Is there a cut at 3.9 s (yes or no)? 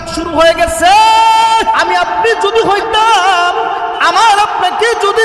no